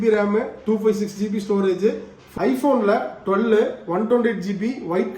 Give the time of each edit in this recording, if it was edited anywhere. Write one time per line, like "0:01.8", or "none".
0:02.1